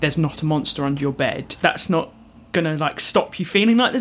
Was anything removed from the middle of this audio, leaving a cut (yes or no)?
yes